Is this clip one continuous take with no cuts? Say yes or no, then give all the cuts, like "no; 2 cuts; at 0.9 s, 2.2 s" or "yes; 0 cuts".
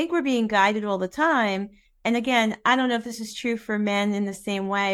yes; 0 cuts